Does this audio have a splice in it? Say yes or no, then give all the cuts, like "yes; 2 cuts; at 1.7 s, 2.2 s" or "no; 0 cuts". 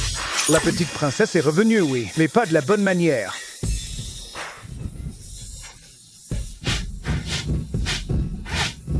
no; 0 cuts